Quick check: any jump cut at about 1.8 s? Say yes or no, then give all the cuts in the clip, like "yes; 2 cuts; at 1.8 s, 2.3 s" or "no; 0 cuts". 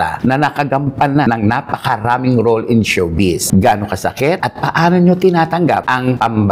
no; 0 cuts